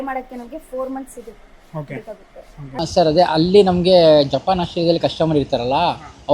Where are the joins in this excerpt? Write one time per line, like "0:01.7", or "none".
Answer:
0:02.8